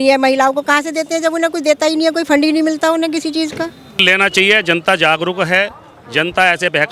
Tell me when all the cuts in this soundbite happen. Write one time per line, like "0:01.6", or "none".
0:04.0